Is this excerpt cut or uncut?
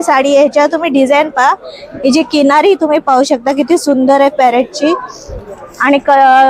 uncut